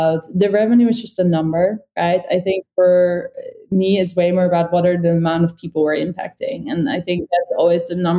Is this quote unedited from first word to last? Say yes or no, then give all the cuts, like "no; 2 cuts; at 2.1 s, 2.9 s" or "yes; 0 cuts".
yes; 0 cuts